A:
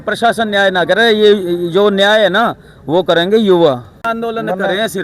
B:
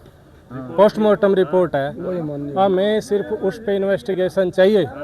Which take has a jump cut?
A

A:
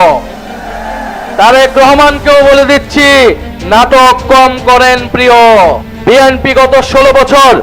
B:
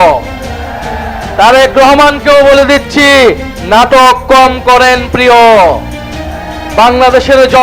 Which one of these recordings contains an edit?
A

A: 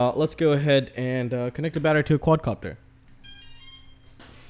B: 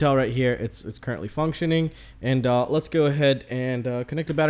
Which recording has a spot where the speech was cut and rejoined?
A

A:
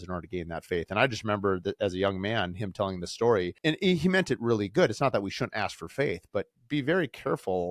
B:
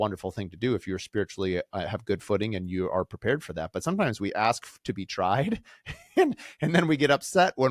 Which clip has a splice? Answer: A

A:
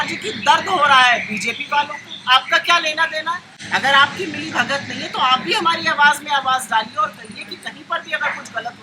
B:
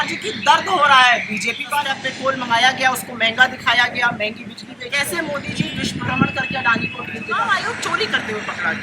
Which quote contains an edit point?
B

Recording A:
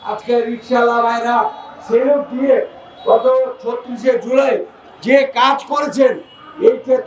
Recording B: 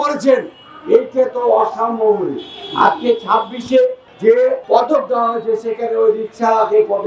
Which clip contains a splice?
B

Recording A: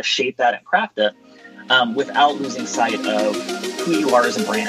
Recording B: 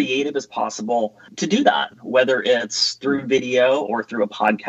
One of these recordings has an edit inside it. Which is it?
B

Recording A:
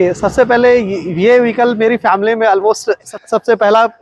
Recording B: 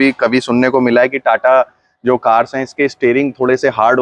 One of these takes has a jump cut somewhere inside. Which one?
A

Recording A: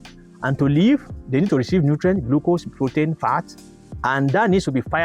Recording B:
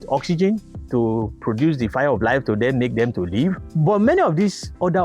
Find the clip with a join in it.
B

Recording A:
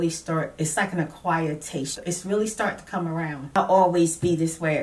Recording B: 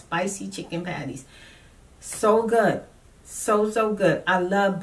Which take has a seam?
A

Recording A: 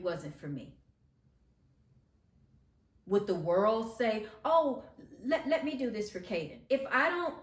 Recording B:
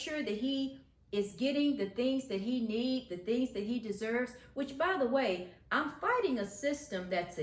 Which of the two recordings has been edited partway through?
A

